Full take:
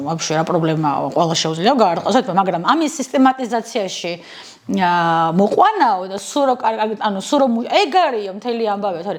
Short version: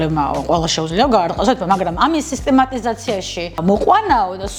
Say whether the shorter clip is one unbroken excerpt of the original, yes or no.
no